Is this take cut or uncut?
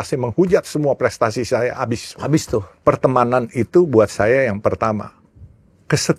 cut